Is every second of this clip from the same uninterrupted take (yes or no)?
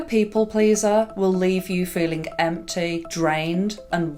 yes